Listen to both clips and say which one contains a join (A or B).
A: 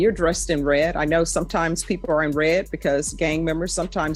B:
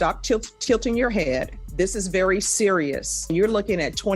B